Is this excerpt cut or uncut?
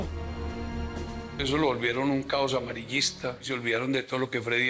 cut